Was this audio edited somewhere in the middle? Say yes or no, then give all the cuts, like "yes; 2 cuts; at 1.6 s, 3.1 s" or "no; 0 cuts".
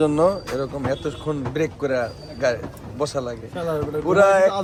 no; 0 cuts